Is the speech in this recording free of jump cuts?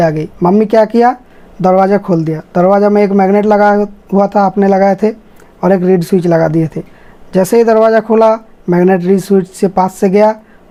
yes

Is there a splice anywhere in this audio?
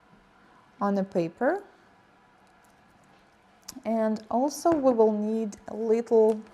yes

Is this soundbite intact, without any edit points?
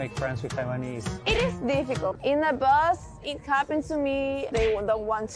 no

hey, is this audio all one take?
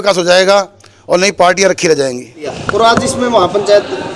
yes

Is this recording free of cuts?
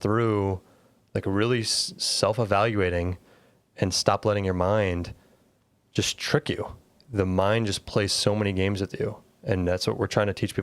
yes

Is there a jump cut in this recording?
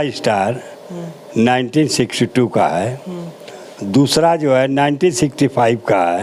no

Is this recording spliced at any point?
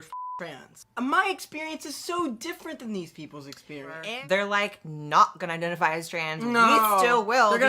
yes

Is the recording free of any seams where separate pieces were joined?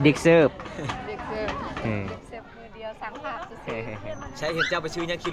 yes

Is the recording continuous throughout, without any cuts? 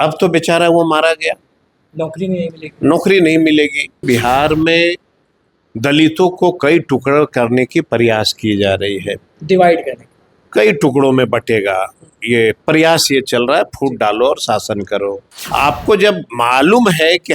no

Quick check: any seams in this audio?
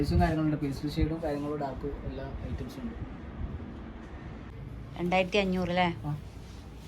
yes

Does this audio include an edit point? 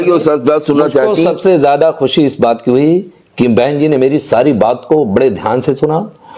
no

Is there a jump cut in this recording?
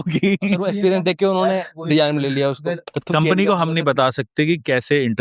yes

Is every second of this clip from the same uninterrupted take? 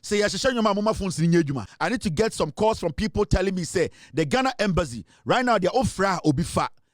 no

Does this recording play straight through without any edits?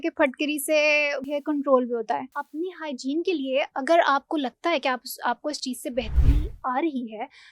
no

